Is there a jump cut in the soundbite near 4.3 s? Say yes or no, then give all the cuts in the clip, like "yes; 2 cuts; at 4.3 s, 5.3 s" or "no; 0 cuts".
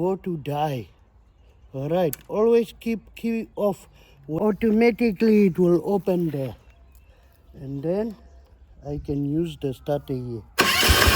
yes; 1 cut; at 4.3 s